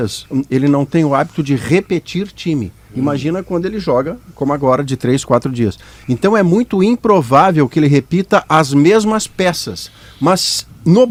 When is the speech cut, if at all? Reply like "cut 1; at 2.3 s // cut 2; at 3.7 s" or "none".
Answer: none